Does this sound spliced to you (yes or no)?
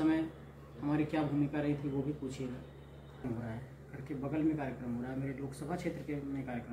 yes